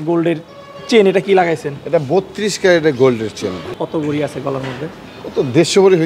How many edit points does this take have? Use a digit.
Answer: 1